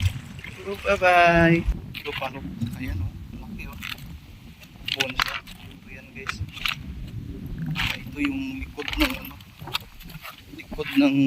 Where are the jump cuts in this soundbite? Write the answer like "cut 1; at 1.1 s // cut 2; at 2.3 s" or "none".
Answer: cut 1; at 1.7 s